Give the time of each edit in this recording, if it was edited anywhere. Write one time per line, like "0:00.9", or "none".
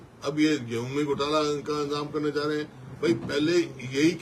none